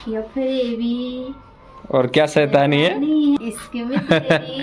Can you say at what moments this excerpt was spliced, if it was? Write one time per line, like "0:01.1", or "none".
0:03.4